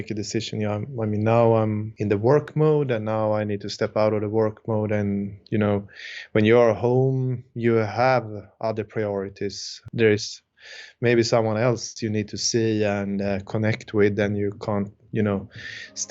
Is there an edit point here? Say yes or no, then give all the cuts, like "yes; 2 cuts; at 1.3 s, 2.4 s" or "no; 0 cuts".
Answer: yes; 2 cuts; at 1.9 s, 9.9 s